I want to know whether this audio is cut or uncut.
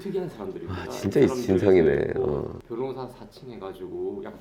cut